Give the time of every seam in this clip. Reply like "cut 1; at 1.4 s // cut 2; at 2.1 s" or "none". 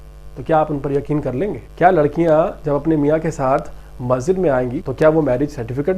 cut 1; at 1.6 s // cut 2; at 4.8 s